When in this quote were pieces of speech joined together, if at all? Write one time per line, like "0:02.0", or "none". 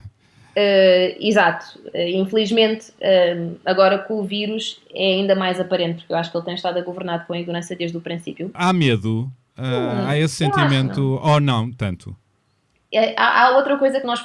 0:08.6